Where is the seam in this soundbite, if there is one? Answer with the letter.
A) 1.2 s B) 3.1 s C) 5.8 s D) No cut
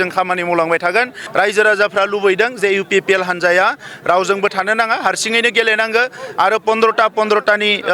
A